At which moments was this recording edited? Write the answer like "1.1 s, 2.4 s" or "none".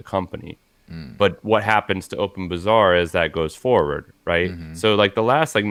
none